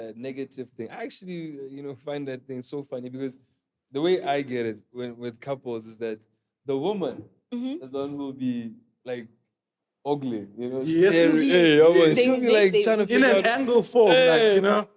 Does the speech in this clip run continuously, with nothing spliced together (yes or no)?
yes